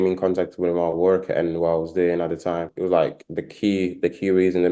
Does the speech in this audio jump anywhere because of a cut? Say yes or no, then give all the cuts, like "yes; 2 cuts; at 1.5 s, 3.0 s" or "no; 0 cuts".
yes; 1 cut; at 2.7 s